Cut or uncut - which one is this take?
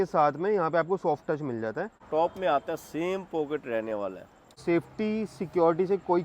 cut